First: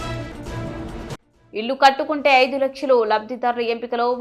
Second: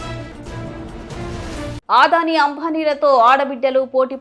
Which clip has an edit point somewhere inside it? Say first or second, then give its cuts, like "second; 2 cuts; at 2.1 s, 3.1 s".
first; 1 cut; at 1.1 s